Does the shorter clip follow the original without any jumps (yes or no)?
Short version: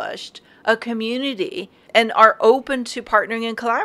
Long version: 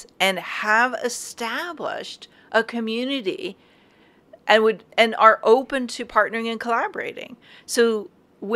no